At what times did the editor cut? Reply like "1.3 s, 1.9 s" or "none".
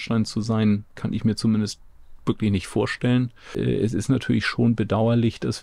3.5 s